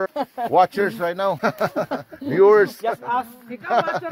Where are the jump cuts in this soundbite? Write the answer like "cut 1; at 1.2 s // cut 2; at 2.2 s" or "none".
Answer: cut 1; at 1.4 s